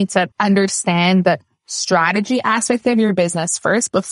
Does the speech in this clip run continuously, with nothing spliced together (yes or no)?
yes